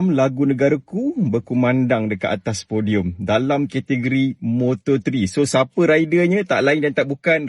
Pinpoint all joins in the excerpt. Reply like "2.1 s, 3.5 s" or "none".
none